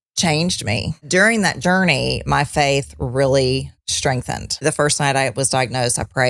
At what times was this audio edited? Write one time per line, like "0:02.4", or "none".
0:01.0
0:04.6